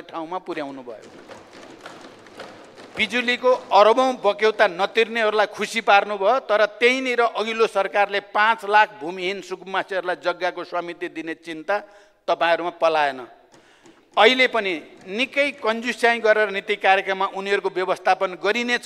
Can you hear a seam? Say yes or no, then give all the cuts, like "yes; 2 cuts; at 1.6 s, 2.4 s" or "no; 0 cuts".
no; 0 cuts